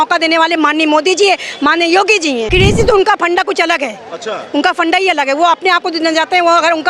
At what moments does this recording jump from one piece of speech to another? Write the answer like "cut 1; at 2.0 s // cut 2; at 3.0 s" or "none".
cut 1; at 2.5 s